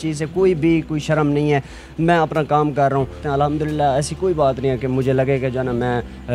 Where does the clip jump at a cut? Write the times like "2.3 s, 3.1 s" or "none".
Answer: 3.2 s